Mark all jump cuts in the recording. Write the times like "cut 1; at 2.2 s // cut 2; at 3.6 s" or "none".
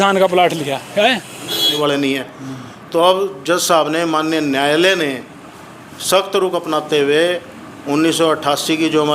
cut 1; at 1.7 s